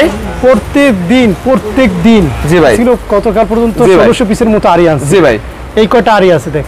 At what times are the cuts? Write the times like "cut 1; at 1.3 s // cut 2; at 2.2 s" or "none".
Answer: cut 1; at 2.8 s